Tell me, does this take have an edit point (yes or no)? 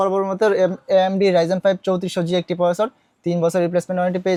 no